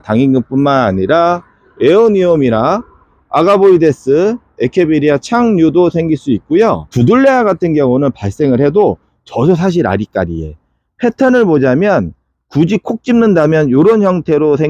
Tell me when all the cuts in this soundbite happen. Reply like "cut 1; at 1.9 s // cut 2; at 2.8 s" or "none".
cut 1; at 6.9 s